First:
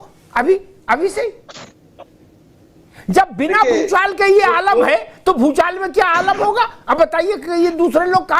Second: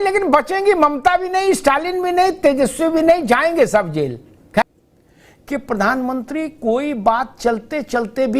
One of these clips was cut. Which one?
second; 1 cut; at 4.6 s

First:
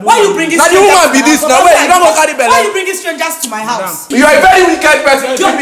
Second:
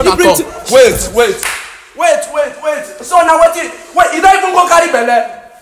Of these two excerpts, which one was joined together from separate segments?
first; 1 cut; at 4.0 s

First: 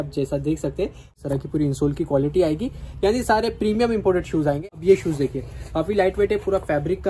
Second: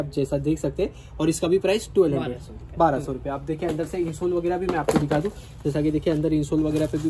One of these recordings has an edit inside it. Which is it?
first; 2 cuts; at 1.2 s, 4.7 s

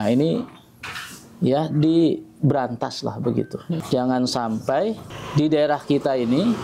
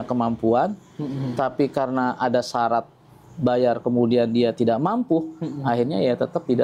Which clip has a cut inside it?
first; 2 cuts; at 3.8 s, 5.1 s

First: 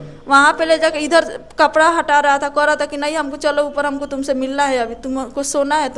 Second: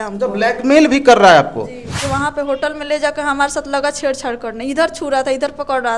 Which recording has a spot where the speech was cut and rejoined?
second; 1 cut; at 1.9 s

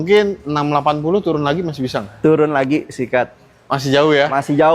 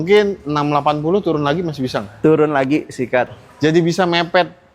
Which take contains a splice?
second; 1 cut; at 3.4 s

